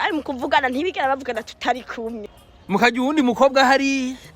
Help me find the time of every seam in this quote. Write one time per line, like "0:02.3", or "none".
0:02.3